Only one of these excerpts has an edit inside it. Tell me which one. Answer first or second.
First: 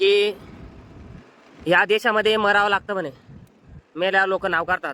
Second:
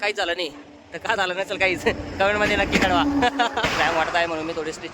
second